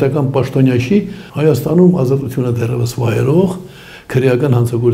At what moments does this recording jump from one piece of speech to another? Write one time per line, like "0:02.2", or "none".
0:01.2